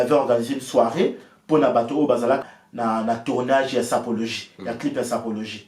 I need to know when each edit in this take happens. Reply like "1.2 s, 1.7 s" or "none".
2.4 s